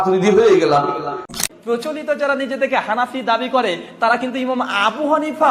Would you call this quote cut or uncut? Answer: cut